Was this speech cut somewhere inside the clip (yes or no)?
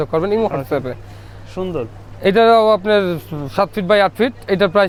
no